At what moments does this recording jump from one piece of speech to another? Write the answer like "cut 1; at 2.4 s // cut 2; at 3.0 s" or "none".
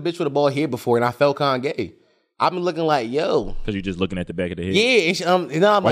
none